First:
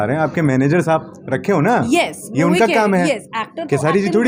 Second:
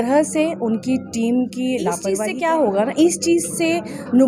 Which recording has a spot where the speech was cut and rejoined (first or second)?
second